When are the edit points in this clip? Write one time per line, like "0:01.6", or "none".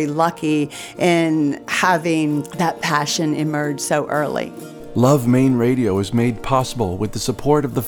0:01.7
0:02.5
0:04.7